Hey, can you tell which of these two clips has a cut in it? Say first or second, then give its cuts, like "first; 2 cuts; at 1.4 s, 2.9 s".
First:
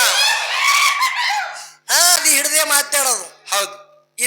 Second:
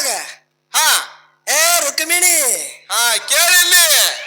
first; 1 cut; at 2.2 s